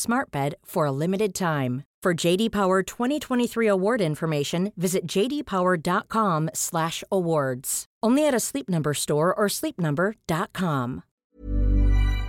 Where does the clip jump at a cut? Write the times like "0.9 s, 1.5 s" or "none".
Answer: 11.2 s